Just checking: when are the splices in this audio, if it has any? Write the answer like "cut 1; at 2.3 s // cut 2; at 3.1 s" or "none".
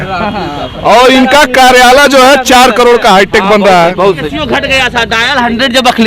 cut 1; at 4.3 s